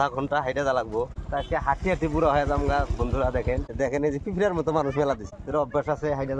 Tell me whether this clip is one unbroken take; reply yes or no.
no